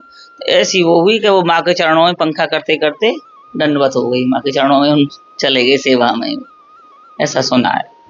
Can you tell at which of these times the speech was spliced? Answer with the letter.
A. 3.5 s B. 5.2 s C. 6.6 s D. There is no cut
D